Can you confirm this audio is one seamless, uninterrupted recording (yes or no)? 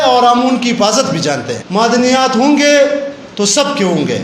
no